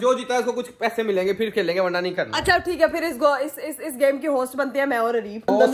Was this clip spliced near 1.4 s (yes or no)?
no